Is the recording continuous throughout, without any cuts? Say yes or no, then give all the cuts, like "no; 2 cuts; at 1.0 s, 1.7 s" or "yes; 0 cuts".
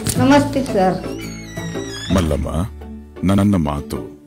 yes; 0 cuts